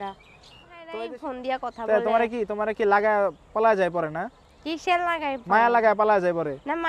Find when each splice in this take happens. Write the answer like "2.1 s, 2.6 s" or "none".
1.0 s